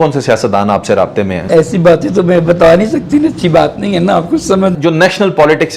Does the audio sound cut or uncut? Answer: cut